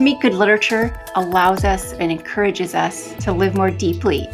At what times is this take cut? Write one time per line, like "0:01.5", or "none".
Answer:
0:01.0
0:03.1

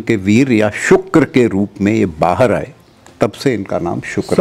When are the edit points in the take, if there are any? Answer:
none

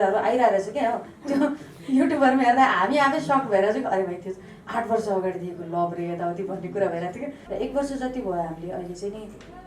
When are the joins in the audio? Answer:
0:07.4

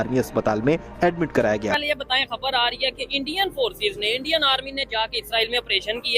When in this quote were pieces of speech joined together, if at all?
0:01.9

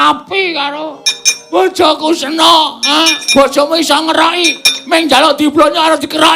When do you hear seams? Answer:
0:03.2

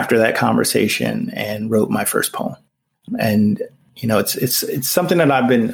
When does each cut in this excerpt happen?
0:03.0
0:03.8

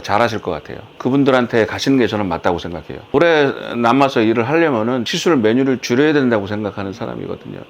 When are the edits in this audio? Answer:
0:03.1
0:05.1

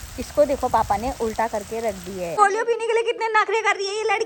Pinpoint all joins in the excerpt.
0:02.4

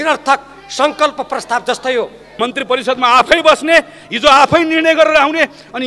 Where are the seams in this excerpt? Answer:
0:02.3

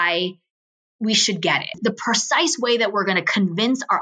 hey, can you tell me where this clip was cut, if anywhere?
0:01.8

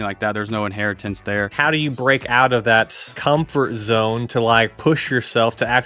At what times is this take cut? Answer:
0:01.5
0:03.1

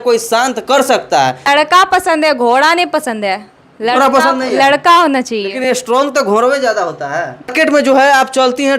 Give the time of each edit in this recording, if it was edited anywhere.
0:01.5
0:07.5

